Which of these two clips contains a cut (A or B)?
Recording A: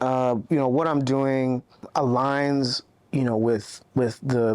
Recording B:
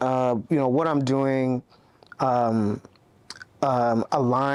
A